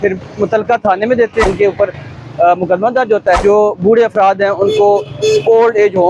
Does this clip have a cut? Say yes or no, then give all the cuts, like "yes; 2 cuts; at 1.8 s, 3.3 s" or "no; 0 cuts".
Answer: yes; 2 cuts; at 1.4 s, 3.4 s